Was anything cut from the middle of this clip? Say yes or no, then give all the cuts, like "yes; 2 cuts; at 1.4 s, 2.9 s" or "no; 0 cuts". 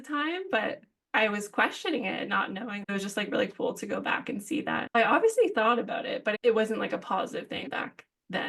yes; 3 cuts; at 2.9 s, 4.9 s, 6.4 s